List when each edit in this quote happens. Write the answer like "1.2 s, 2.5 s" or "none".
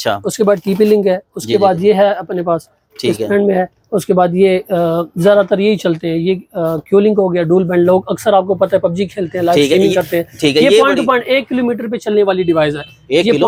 none